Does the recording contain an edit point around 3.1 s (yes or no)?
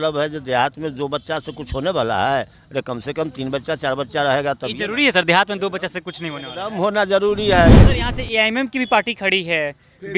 no